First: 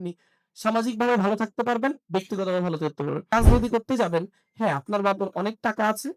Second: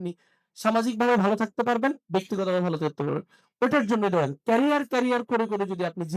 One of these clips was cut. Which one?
first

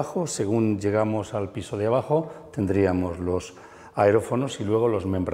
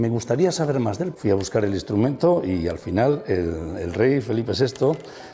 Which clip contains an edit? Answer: second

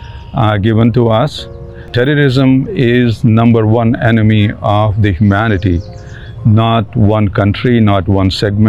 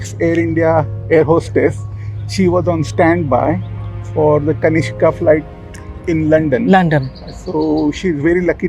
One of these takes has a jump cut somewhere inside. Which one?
first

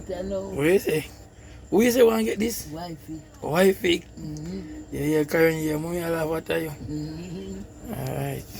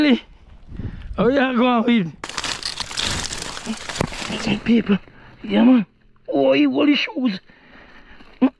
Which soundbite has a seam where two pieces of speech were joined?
second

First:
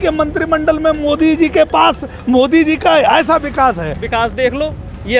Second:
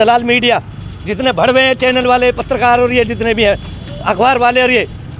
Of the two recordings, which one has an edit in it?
first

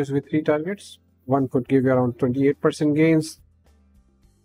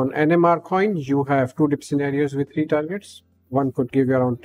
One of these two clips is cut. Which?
first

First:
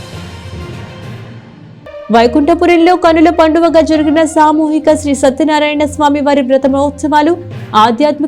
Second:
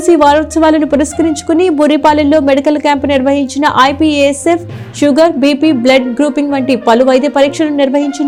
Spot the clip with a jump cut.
first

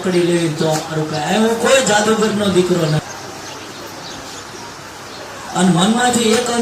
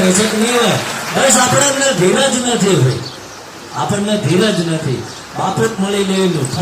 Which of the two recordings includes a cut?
first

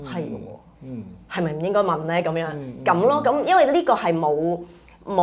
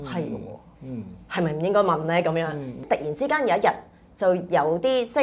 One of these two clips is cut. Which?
second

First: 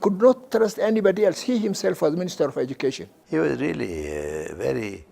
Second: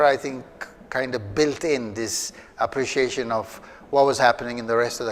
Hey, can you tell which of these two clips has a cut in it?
first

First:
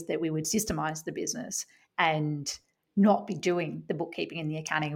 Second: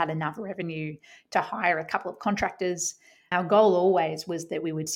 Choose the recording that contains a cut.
second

